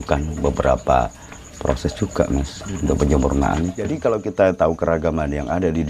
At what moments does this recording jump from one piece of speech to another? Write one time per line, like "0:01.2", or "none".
0:03.9